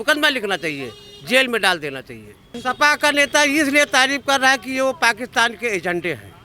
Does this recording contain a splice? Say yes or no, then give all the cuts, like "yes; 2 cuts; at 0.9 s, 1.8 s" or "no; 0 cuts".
yes; 1 cut; at 2.6 s